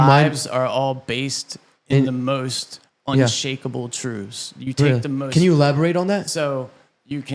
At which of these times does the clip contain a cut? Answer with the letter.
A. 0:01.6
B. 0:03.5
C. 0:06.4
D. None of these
D